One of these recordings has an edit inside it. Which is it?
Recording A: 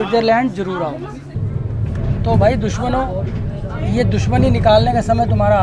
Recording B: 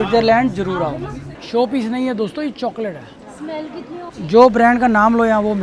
B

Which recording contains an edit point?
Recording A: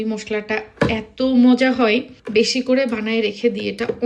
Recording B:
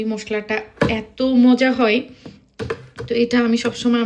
A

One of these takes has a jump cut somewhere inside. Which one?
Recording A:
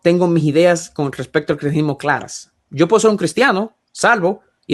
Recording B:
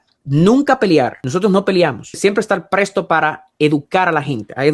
B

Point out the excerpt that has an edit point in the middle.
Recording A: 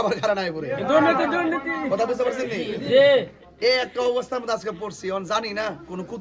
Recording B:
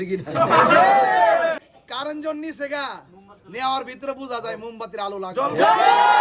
B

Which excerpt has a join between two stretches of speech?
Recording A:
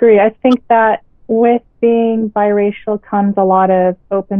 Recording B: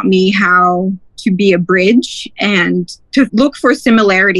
B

